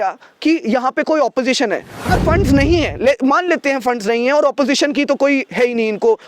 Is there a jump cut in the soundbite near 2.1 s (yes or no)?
yes